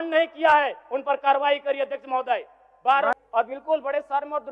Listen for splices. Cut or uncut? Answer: cut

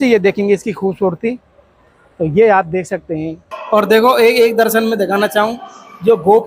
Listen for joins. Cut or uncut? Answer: cut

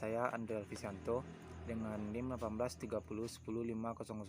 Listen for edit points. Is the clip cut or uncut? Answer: cut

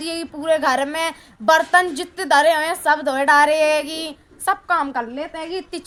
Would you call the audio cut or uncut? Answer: uncut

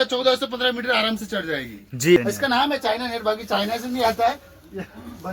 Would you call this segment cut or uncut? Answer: cut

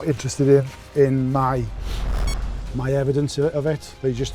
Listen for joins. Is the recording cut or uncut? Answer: uncut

